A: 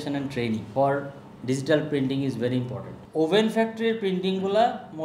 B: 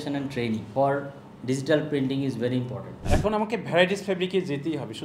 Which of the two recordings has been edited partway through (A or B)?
B